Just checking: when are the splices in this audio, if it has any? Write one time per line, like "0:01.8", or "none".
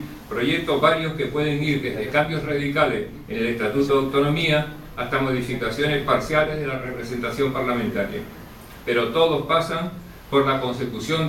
0:05.9